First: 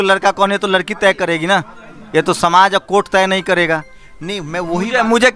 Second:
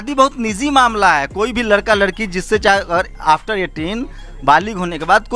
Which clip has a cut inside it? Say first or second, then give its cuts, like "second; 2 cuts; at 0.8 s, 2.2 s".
first; 1 cut; at 3.9 s